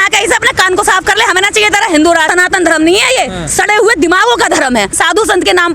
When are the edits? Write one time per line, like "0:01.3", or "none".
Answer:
0:02.3
0:05.0